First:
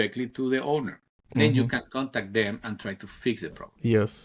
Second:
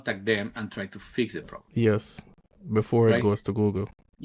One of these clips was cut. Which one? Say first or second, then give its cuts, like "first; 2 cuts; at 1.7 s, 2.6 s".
first; 1 cut; at 1.2 s